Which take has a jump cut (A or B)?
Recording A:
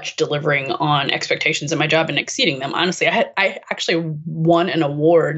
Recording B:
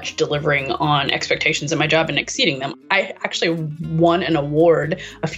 B